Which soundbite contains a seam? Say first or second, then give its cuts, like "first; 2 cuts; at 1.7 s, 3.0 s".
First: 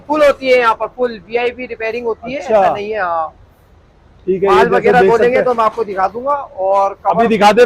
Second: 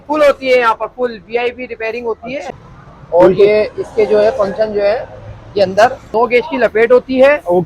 second; 2 cuts; at 2.5 s, 6.1 s